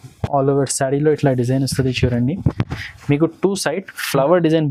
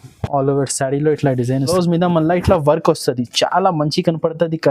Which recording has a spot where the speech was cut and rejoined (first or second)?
second